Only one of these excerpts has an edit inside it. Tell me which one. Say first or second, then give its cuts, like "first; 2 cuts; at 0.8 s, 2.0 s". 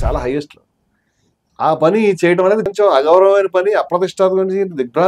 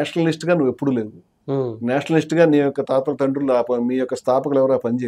first; 1 cut; at 2.6 s